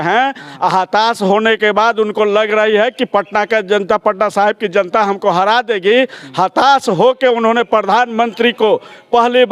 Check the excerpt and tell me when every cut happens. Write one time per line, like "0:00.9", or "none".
none